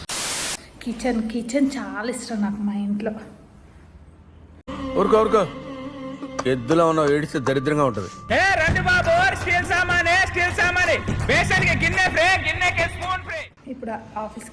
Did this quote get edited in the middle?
yes; 1 cut; at 13.5 s

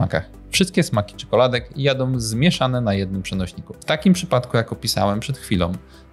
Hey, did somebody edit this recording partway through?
yes; 1 cut; at 3.7 s

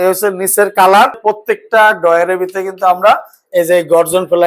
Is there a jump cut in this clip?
yes; 1 cut; at 1.2 s

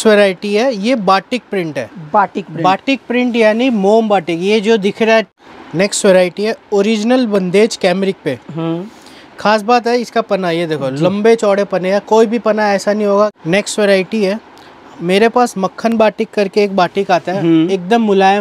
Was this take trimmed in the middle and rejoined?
yes; 2 cuts; at 5.3 s, 13.3 s

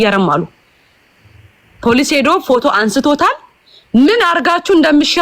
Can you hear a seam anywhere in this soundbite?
no; 0 cuts

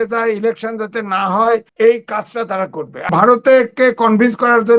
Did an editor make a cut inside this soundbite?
yes; 2 cuts; at 1.7 s, 3.1 s

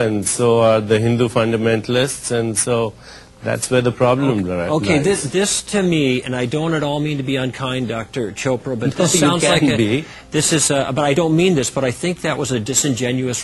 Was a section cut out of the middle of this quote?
no; 0 cuts

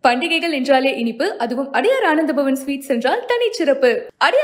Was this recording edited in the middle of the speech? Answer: no; 0 cuts

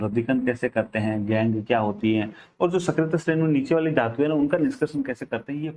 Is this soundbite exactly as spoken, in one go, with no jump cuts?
yes; 0 cuts

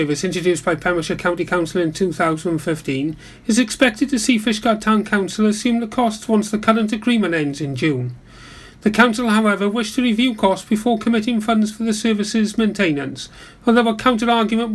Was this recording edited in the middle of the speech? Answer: no; 0 cuts

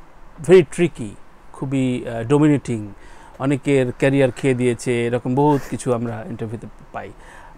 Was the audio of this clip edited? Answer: no; 0 cuts

